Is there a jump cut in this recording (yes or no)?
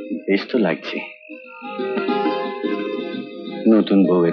no